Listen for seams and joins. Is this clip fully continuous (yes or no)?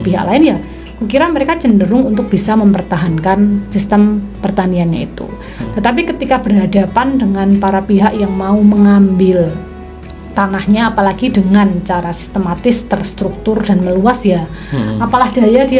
yes